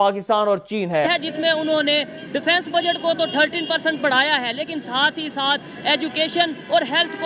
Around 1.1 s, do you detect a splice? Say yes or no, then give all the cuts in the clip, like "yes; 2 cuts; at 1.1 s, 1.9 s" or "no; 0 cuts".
yes; 1 cut; at 1.1 s